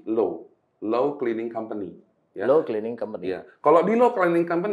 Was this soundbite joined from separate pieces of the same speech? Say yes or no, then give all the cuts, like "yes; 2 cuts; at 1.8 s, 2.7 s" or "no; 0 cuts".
no; 0 cuts